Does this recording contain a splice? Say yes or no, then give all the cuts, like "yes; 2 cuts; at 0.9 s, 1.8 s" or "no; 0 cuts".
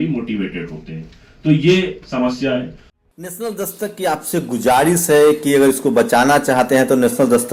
no; 0 cuts